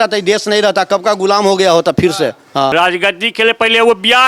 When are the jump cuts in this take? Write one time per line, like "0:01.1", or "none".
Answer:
0:02.7